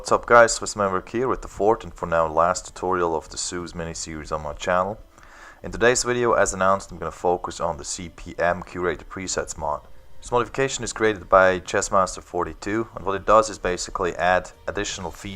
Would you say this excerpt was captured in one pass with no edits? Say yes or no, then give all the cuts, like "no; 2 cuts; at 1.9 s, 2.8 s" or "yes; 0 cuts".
no; 1 cut; at 10.2 s